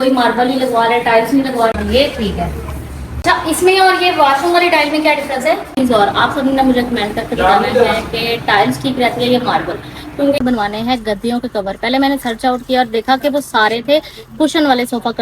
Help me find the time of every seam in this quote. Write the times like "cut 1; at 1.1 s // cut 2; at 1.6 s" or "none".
cut 1; at 1.7 s // cut 2; at 3.1 s // cut 3; at 5.7 s // cut 4; at 10.4 s